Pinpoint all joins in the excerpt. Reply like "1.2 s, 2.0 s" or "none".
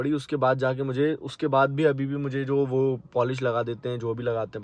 none